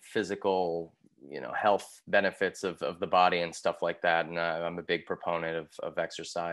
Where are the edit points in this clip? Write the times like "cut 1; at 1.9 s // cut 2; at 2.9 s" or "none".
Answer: none